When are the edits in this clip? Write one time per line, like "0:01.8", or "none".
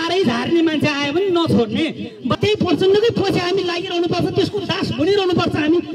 0:02.4